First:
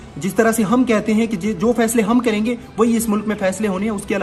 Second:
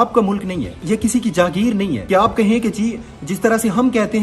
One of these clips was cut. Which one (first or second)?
second